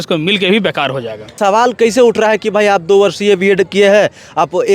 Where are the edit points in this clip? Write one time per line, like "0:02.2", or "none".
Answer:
none